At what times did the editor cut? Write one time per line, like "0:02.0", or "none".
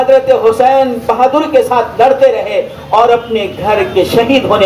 none

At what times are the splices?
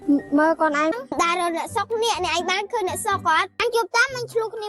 0:00.9

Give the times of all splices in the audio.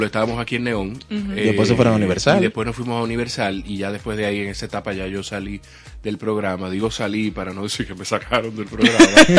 none

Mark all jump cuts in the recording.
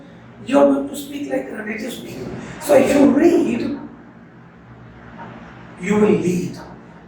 0:02.1

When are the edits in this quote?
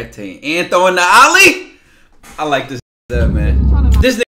none

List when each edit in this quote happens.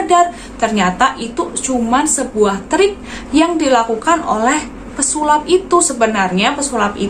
none

